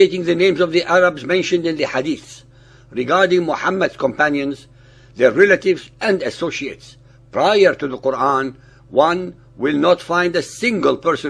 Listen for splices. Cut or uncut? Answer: uncut